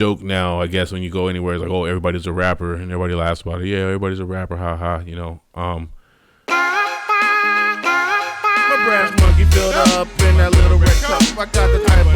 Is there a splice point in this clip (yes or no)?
yes